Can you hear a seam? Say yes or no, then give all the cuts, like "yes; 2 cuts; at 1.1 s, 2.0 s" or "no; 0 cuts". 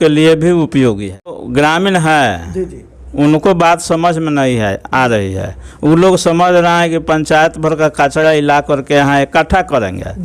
yes; 1 cut; at 1.4 s